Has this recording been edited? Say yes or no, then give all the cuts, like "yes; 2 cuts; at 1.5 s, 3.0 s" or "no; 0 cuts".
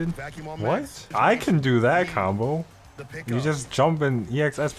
yes; 1 cut; at 1.0 s